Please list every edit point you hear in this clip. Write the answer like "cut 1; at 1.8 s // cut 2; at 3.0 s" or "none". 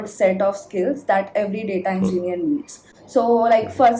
none